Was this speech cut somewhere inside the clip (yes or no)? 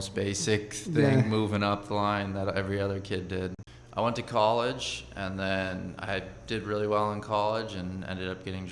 yes